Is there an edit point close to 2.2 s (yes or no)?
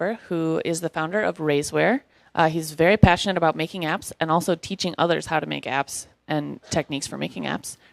yes